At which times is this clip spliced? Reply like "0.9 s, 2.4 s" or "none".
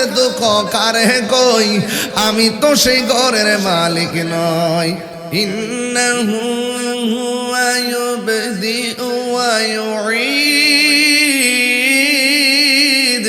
5.1 s